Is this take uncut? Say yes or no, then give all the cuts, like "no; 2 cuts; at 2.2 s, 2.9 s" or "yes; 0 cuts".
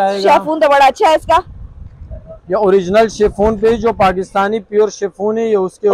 yes; 0 cuts